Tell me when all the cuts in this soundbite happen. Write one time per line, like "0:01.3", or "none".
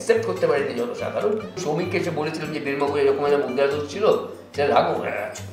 0:01.6